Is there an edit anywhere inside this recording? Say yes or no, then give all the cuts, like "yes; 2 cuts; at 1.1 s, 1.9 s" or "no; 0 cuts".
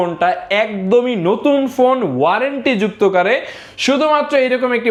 no; 0 cuts